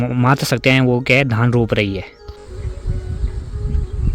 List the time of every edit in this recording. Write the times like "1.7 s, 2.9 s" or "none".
2.4 s